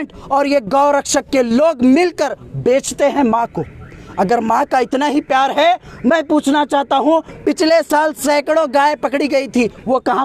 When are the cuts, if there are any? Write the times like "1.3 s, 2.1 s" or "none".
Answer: none